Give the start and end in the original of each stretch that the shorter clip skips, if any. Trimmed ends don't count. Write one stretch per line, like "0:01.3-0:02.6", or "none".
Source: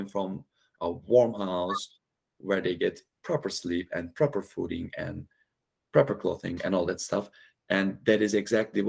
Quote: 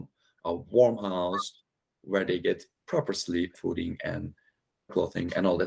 0:03.9-0:04.5
0:05.8-0:06.2